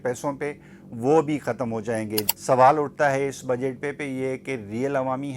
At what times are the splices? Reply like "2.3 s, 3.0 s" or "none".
2.3 s